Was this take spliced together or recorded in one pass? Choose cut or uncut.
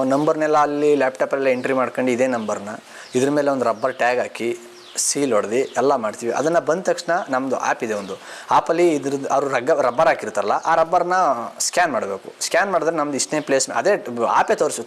uncut